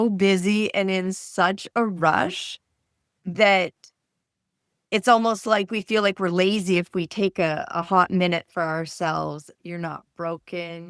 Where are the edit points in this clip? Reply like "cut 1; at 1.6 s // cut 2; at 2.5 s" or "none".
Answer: cut 1; at 9.5 s